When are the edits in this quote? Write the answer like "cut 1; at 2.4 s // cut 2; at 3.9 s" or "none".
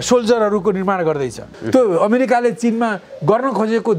cut 1; at 1.5 s